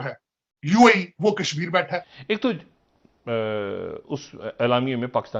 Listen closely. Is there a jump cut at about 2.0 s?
yes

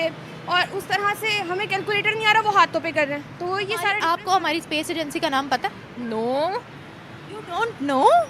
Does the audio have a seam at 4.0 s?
yes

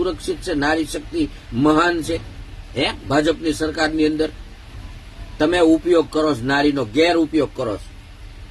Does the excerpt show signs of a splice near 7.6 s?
no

